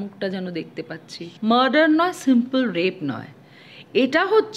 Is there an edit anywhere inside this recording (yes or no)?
yes